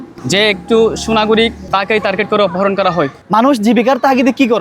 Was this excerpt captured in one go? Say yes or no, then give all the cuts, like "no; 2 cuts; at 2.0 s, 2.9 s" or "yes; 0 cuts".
no; 2 cuts; at 1.6 s, 3.2 s